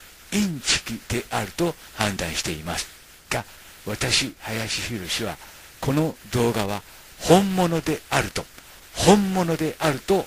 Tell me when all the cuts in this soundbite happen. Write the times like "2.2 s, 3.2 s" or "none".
none